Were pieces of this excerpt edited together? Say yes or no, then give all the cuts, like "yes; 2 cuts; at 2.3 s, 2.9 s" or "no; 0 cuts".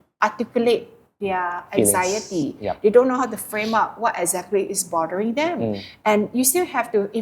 no; 0 cuts